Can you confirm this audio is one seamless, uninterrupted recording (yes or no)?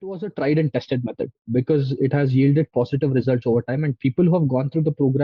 yes